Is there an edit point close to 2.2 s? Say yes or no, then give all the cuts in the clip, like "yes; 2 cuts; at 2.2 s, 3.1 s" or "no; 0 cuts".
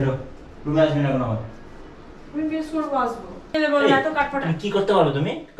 no; 1 cut; at 3.5 s